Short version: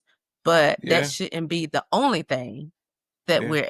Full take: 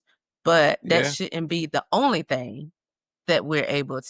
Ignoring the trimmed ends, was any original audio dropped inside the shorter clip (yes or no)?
no